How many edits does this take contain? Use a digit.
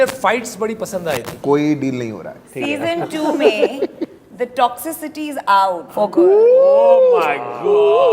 3